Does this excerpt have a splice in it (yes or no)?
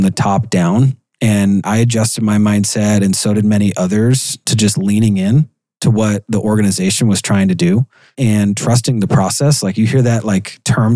no